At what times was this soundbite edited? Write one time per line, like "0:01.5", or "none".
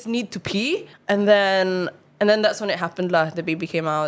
0:00.9